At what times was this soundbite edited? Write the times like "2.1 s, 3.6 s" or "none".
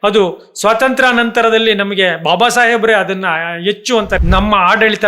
4.2 s